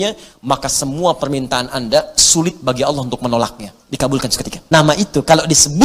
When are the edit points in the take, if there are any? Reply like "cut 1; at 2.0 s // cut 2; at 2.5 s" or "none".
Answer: cut 1; at 4.5 s